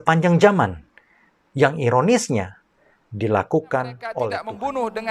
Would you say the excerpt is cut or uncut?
cut